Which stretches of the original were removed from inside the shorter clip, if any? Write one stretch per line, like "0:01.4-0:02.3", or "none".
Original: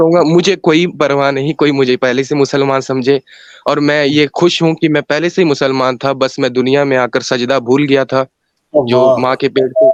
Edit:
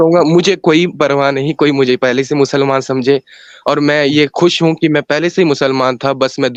none